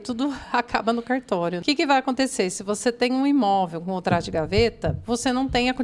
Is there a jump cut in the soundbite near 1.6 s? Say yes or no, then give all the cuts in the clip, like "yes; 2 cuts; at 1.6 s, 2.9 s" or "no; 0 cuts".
yes; 1 cut; at 1.6 s